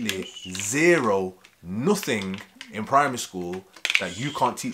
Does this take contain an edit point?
no; 0 cuts

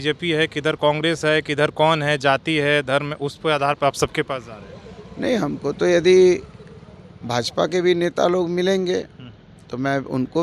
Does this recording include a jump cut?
no; 0 cuts

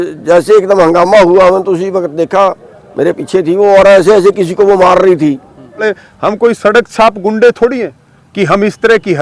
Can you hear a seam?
yes; 1 cut; at 5.8 s

